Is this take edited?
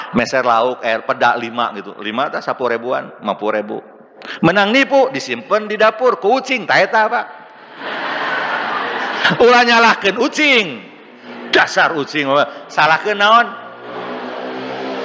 no; 0 cuts

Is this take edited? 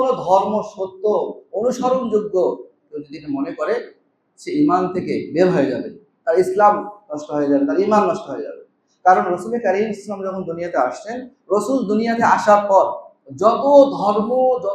no; 0 cuts

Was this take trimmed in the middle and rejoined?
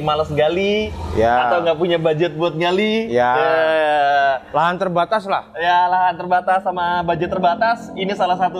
no; 0 cuts

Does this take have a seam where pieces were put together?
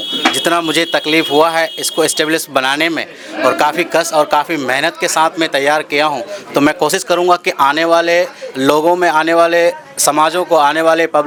no; 0 cuts

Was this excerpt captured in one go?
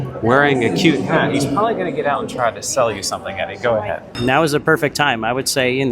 no; 1 cut; at 4.1 s

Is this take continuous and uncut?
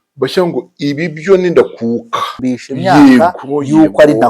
no; 1 cut; at 2.4 s

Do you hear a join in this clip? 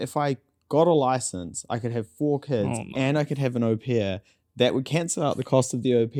no; 0 cuts

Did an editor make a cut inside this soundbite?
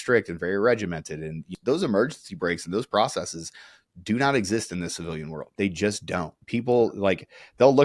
yes; 2 cuts; at 1.5 s, 5.4 s

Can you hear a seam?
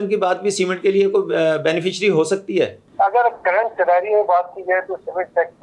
yes; 1 cut; at 2.8 s

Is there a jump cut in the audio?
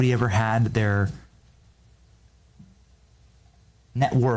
no; 0 cuts

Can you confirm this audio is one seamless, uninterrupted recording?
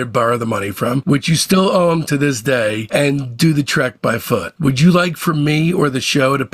no; 1 cut; at 4.5 s

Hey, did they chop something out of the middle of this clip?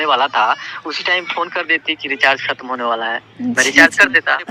no; 0 cuts

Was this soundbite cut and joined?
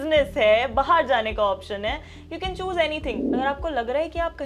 yes; 1 cut; at 3.2 s

